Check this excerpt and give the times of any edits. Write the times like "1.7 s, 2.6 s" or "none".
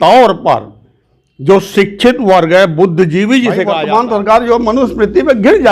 3.7 s